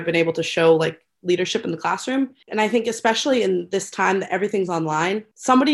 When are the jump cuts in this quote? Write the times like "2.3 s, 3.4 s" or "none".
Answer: 2.4 s

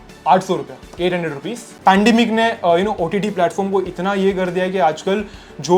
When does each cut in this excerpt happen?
1.7 s

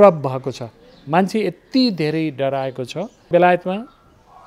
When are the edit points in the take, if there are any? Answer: 3.2 s

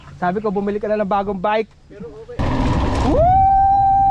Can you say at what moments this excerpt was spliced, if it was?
2.4 s

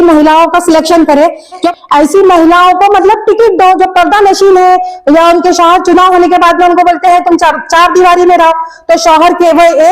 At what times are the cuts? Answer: 1.7 s

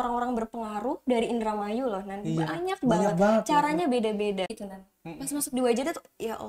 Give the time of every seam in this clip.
4.5 s

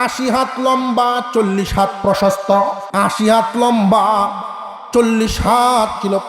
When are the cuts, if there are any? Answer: none

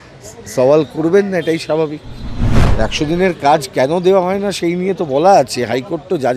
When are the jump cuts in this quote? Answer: 2.6 s

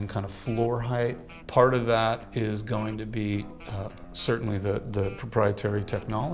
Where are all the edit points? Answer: 1.3 s

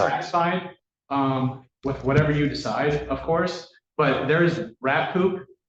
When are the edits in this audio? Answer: none

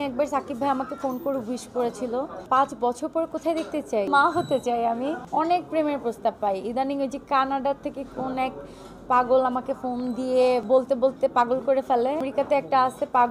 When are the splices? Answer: 2.4 s, 4.1 s, 5.2 s, 10.6 s, 12.3 s

